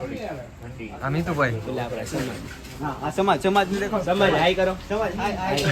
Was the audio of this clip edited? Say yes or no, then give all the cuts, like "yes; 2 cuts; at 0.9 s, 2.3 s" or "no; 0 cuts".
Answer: no; 0 cuts